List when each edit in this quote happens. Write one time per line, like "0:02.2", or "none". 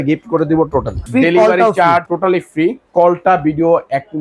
0:01.1
0:02.6